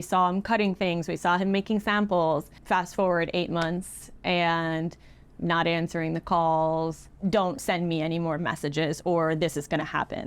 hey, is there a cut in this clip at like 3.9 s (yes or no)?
no